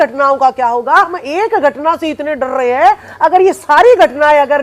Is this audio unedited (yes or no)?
no